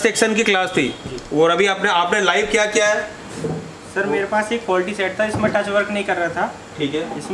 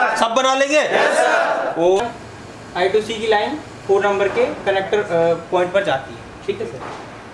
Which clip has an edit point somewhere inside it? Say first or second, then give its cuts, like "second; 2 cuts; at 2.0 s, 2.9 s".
second; 1 cut; at 2.0 s